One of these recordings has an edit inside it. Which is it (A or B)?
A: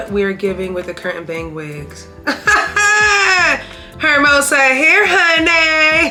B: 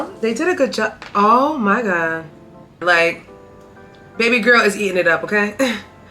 B